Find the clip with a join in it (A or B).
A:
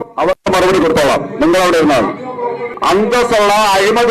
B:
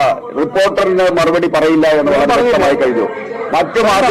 A